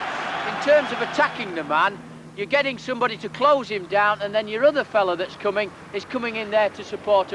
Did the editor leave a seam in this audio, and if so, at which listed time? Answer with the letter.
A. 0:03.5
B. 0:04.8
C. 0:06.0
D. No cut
B